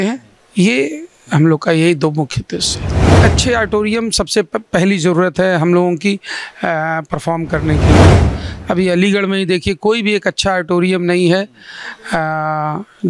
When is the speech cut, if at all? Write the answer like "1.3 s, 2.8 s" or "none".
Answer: 3.2 s, 8.1 s